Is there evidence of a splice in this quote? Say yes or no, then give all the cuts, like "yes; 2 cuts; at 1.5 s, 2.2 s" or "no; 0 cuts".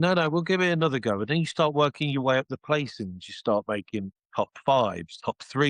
no; 0 cuts